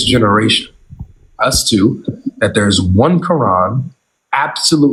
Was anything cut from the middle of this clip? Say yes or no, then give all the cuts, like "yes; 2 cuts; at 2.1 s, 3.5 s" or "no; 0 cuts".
no; 0 cuts